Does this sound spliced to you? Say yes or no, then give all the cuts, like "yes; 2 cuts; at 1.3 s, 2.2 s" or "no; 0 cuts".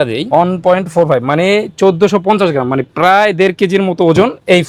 no; 0 cuts